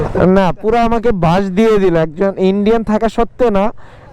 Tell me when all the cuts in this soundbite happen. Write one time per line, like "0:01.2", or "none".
none